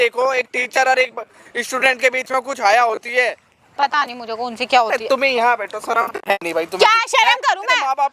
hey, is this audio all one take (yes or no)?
yes